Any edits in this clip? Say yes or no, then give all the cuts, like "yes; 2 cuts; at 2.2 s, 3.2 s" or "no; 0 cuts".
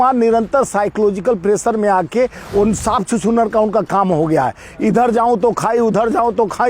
no; 0 cuts